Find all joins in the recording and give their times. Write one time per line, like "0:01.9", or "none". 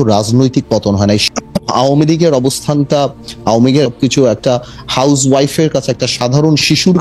0:01.3
0:03.9